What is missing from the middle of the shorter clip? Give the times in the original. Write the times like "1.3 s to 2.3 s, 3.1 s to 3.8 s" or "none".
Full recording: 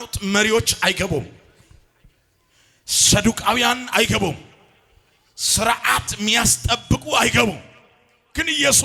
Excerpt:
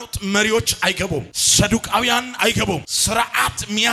1.4 s to 2.9 s, 4.5 s to 5.4 s